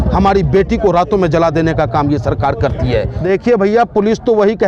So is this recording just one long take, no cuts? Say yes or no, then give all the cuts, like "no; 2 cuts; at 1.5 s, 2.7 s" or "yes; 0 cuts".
no; 1 cut; at 3.1 s